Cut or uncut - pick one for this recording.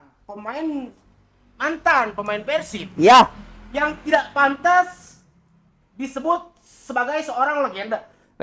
uncut